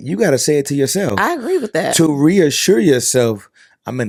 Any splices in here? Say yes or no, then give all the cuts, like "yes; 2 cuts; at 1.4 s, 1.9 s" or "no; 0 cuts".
no; 0 cuts